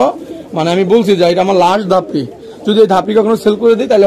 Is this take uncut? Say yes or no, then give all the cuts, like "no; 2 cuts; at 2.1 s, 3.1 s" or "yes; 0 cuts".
yes; 0 cuts